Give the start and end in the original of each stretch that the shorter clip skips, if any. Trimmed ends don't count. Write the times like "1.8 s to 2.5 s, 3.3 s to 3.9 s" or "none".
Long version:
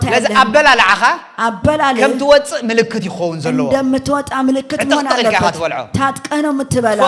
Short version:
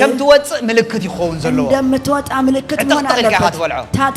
none

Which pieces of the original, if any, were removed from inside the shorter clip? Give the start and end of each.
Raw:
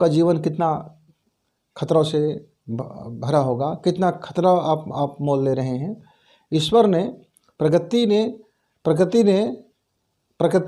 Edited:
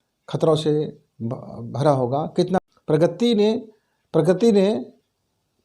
4.1 s to 7.3 s

